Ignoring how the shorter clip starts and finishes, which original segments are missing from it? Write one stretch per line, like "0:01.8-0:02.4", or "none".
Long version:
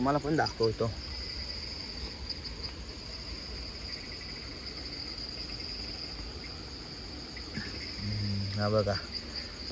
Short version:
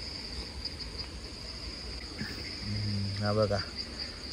0:03.6-0:07.4